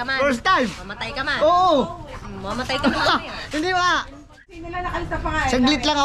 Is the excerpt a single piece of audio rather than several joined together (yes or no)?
no